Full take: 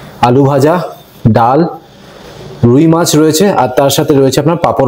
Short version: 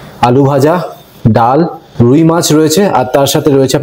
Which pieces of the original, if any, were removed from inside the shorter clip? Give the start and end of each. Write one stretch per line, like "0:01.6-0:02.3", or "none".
0:01.8-0:02.5